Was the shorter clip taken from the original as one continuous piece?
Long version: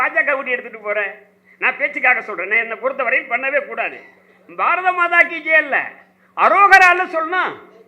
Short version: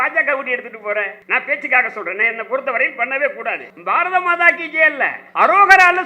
no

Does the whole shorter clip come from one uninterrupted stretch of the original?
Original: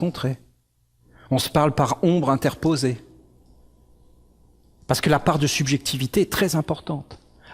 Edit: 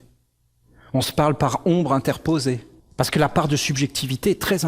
no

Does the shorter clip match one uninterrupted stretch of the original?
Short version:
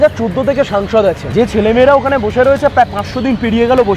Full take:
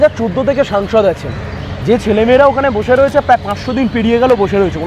no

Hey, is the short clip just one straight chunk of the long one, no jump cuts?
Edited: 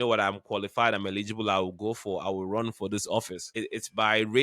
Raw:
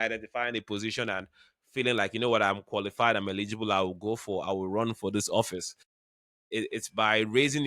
no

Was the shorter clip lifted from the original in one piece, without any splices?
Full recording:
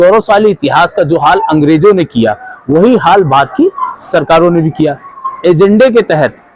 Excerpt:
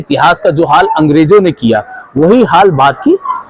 yes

